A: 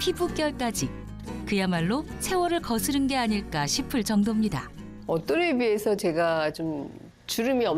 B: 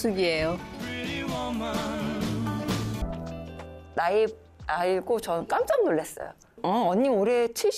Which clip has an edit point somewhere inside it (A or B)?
B